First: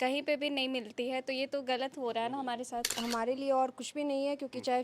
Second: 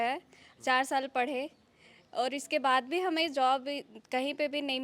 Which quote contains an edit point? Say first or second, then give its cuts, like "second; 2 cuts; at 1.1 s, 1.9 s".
first; 1 cut; at 3.0 s